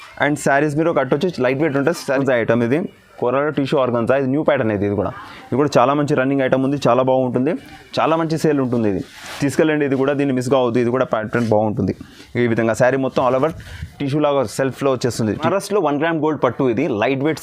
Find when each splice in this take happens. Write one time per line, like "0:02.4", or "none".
0:02.2
0:15.5